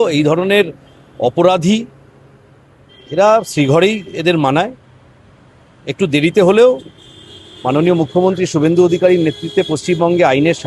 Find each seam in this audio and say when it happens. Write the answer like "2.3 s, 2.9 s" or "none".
none